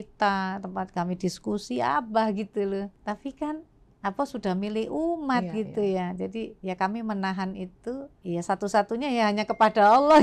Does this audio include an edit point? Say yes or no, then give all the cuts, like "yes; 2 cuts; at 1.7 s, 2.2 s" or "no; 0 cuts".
yes; 2 cuts; at 3.0 s, 8.1 s